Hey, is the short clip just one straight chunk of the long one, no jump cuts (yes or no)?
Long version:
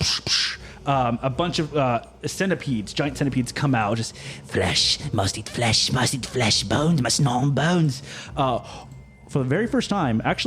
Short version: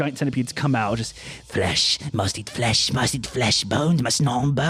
yes